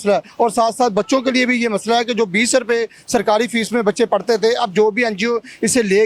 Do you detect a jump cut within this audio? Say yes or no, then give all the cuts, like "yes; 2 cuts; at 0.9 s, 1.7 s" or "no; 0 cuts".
no; 0 cuts